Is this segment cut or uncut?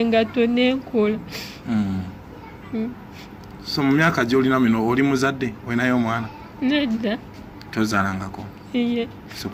uncut